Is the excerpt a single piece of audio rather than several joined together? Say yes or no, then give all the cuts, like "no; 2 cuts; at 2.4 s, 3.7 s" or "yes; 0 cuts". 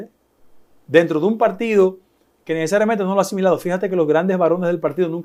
yes; 0 cuts